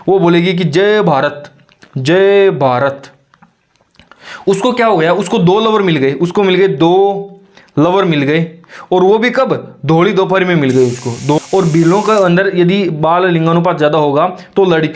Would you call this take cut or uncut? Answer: cut